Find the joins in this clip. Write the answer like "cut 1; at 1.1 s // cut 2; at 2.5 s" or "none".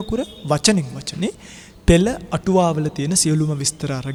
none